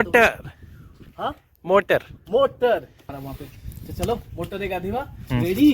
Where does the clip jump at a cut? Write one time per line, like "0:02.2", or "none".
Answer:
0:03.0